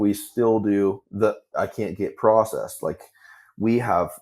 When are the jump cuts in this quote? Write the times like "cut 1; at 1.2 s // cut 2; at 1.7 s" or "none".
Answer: cut 1; at 1.1 s